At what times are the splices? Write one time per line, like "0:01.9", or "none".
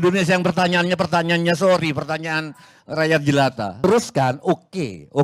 0:03.8